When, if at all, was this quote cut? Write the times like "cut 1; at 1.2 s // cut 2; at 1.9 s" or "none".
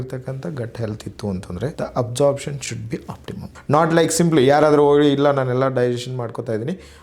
cut 1; at 1.7 s // cut 2; at 3.4 s